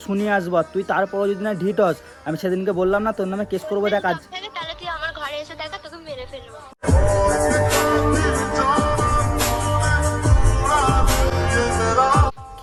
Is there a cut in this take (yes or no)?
no